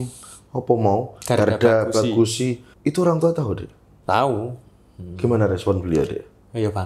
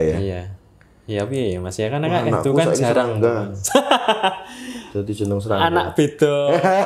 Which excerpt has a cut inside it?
first; 1 cut; at 2.7 s

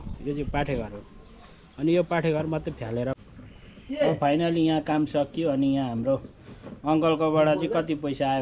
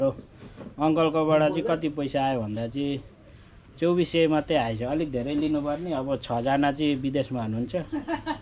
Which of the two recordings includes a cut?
first; 1 cut; at 3.1 s

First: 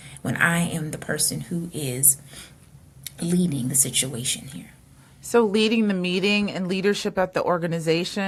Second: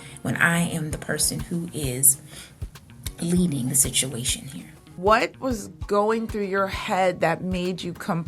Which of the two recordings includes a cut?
second; 1 cut; at 5.0 s

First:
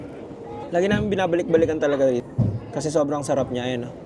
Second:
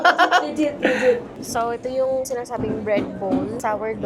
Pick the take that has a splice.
second; 1 cut; at 1.3 s

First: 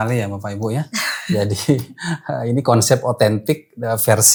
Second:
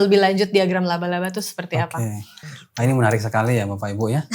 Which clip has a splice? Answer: second; 1 cut; at 2.3 s

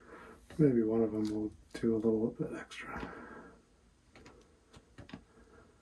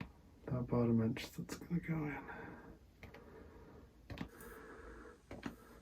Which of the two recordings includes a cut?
second; 1 cut; at 4.3 s

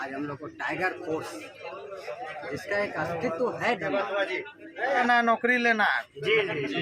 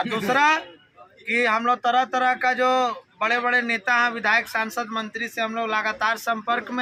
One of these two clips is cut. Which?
first; 1 cut; at 5.0 s

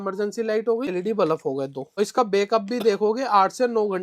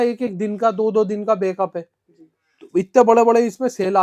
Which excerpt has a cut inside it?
first; 2 cuts; at 0.9 s, 1.9 s

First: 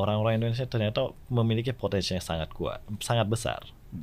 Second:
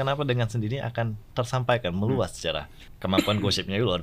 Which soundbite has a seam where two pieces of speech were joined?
second; 1 cut; at 2.9 s

